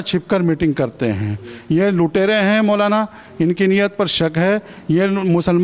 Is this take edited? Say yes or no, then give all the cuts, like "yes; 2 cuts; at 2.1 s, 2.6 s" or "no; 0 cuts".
no; 0 cuts